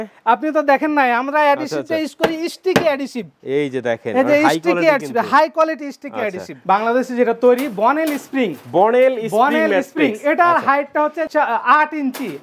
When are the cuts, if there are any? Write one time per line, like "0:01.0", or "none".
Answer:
0:06.6
0:11.3